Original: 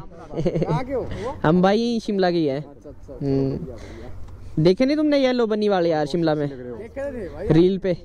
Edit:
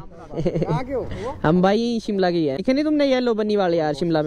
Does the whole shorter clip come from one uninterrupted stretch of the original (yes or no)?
no